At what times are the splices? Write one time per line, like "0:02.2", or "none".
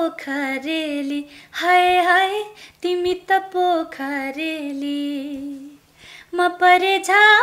none